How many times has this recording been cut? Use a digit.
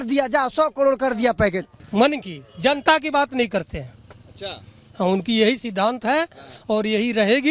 1